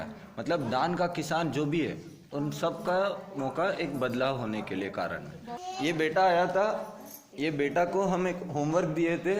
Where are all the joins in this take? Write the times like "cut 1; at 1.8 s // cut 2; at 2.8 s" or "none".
cut 1; at 5.6 s